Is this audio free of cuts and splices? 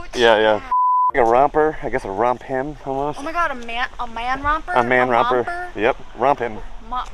no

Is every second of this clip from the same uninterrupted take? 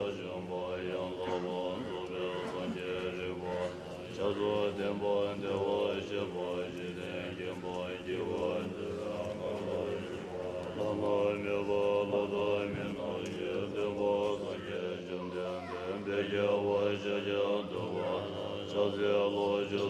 yes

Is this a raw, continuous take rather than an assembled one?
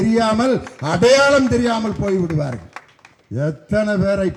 yes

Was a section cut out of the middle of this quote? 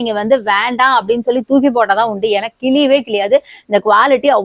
no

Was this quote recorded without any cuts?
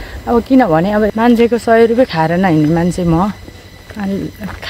no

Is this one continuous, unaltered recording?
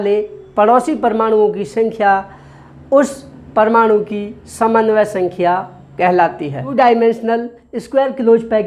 no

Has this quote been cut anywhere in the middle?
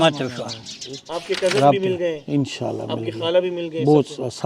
yes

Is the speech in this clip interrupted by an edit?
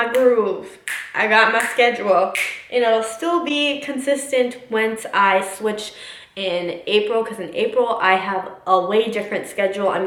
no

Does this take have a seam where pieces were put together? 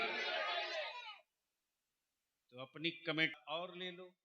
yes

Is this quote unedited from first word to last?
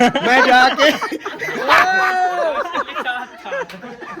no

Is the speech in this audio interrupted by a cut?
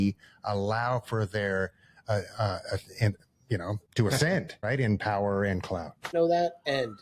yes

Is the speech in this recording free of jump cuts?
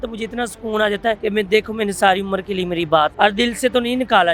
no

